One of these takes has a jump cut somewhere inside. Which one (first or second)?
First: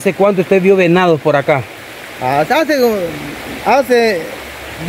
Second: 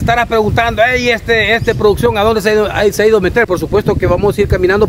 second